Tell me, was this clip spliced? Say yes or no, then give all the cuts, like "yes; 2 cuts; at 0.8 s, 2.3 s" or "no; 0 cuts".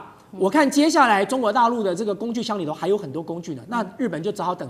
no; 0 cuts